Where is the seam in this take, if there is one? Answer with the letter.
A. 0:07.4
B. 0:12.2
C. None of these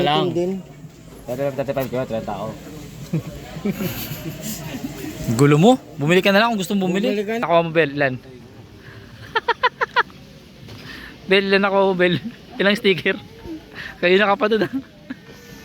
A